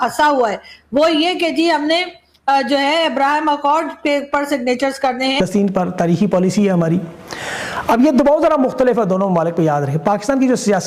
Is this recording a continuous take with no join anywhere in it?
yes; 0 cuts

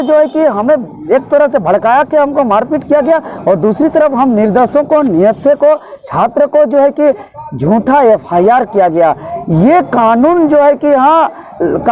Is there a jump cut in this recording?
no; 0 cuts

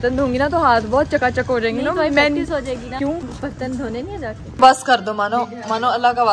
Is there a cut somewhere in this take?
yes; 2 cuts; at 3.0 s, 4.6 s

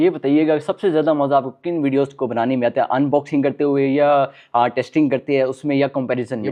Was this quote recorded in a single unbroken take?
yes; 0 cuts

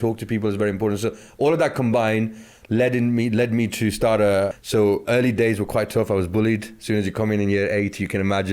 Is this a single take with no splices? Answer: no; 1 cut; at 4.6 s

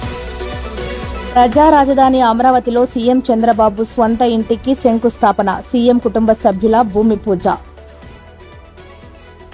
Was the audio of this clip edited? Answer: yes; 1 cut; at 1.2 s

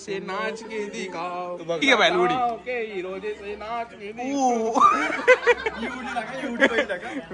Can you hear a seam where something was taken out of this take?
yes; 1 cut; at 1.8 s

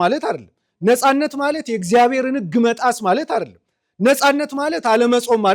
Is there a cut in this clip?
no; 0 cuts

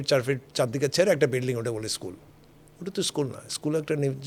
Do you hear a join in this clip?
no; 0 cuts

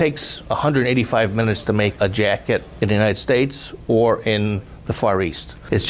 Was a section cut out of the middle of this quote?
no; 0 cuts

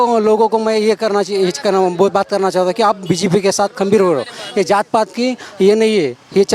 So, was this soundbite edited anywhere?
no; 0 cuts

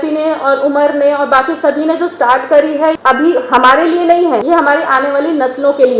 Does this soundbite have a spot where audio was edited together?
yes; 2 cuts; at 3.0 s, 4.4 s

